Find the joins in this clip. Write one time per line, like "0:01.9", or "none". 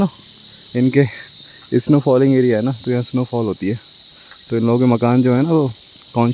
none

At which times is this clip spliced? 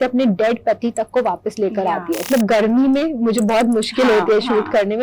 0:02.3

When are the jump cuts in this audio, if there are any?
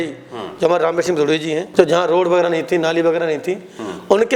0:01.7

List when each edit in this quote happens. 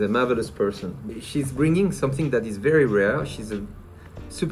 0:01.1

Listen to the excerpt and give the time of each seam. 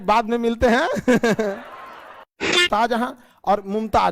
0:02.6

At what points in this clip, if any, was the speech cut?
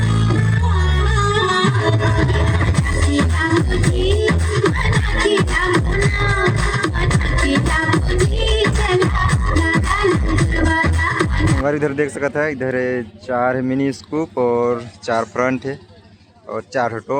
0:11.6

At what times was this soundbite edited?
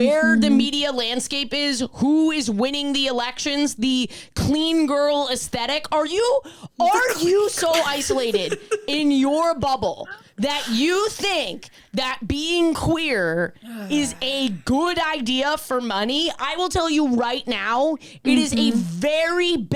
none

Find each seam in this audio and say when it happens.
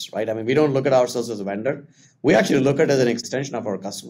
0:03.2

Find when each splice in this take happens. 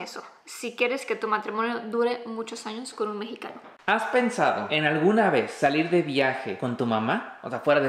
0:03.7
0:04.7
0:05.5
0:06.5

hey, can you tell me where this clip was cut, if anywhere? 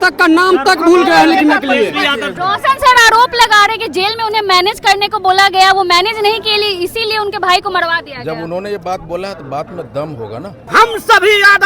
0:02.3
0:10.6

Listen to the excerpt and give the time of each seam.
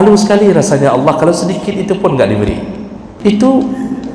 0:03.1

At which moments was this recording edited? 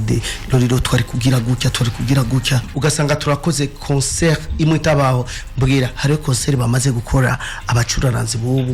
0:02.6

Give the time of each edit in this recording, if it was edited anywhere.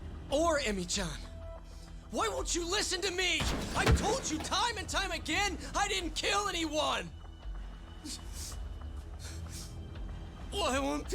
none

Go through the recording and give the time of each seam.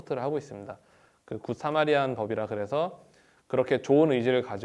none

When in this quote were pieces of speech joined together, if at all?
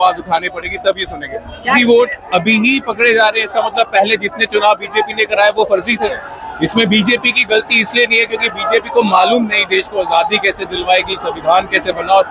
0:01.8
0:06.3

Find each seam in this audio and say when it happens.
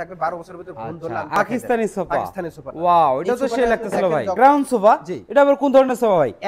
0:01.4
0:04.3

